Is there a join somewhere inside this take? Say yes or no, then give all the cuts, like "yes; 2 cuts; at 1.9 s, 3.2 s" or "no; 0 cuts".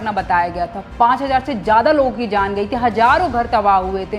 no; 0 cuts